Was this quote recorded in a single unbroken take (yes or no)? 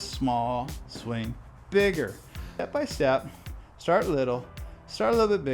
no